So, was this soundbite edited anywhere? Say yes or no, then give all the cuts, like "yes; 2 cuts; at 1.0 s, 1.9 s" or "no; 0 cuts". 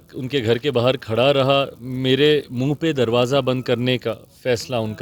no; 0 cuts